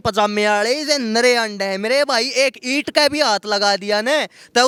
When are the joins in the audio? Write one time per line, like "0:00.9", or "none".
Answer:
none